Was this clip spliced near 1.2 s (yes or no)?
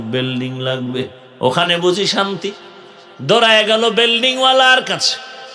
yes